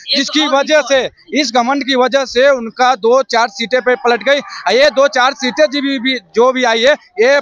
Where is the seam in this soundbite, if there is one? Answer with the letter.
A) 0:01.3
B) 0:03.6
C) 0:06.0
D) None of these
D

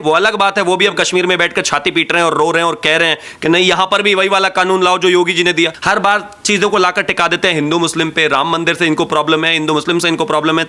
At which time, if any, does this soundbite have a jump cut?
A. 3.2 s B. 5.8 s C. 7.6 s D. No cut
B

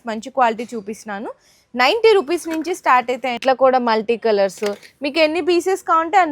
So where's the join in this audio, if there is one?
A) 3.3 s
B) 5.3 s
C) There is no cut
A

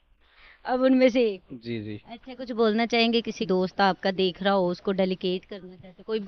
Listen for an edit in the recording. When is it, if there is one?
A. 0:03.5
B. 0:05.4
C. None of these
A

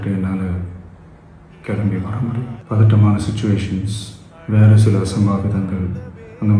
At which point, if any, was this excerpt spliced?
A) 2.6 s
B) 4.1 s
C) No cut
A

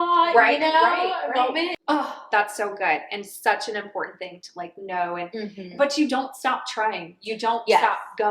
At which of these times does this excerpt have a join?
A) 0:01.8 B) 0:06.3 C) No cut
A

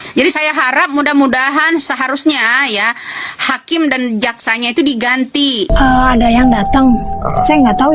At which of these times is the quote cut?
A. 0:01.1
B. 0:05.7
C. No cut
B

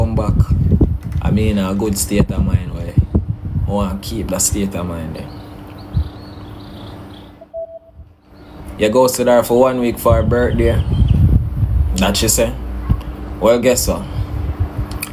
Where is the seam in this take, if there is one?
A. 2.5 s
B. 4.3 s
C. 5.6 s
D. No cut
D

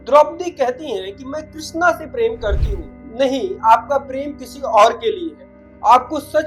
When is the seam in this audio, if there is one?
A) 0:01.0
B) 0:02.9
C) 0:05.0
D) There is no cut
B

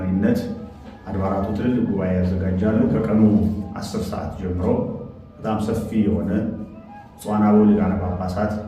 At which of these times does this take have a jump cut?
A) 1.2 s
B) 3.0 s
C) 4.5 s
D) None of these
B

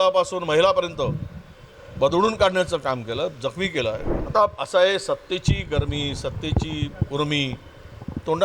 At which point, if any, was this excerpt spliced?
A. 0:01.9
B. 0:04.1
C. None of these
B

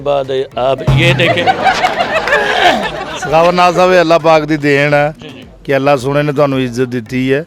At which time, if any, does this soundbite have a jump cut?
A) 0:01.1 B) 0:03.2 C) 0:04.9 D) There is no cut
B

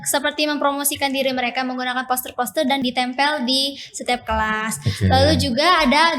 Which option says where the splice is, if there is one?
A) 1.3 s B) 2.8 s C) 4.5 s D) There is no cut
B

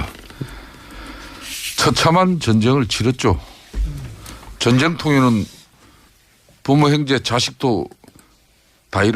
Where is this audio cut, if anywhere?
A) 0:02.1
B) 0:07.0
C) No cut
B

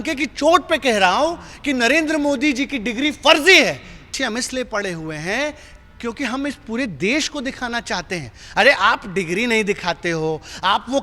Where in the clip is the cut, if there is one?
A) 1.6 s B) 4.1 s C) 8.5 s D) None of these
B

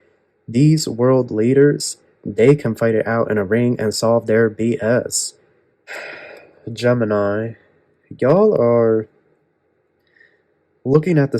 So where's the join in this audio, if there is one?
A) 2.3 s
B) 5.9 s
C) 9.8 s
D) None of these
B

